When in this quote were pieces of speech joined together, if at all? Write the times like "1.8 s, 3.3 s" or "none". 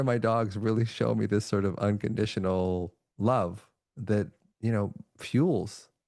none